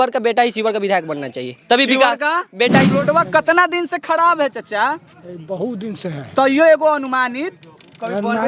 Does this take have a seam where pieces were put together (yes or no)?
yes